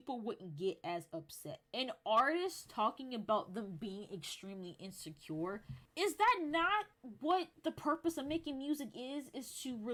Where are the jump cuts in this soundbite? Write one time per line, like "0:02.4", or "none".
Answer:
none